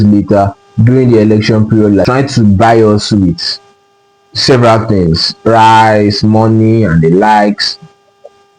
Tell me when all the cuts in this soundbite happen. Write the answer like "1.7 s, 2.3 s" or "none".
2.0 s